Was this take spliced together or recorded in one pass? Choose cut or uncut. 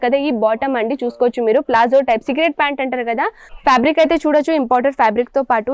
cut